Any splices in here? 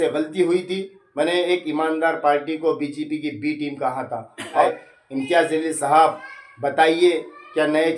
yes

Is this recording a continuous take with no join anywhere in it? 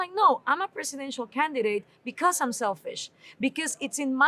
yes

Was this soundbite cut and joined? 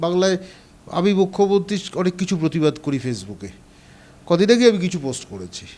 no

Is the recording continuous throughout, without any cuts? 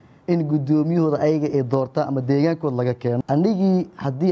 no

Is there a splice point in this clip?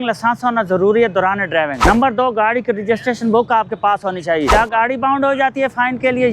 yes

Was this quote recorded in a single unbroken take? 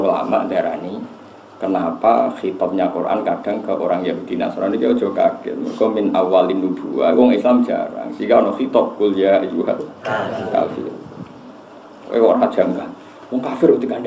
yes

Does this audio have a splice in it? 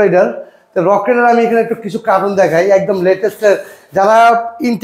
no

